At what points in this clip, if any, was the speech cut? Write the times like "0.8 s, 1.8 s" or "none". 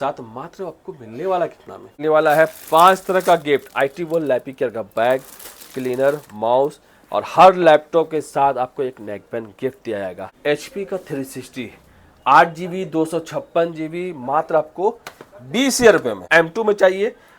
1.9 s, 10.3 s, 16.3 s